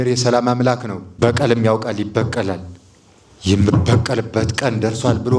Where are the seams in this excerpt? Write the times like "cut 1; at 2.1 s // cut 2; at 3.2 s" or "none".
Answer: cut 1; at 1.0 s